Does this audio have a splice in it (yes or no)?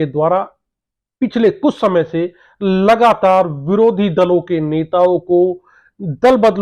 no